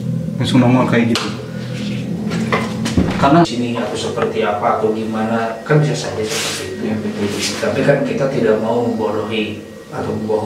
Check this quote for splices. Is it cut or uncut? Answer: cut